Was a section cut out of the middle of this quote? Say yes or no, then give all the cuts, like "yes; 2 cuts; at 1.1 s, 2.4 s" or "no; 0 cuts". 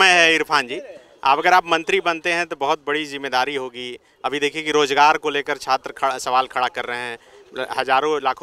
no; 0 cuts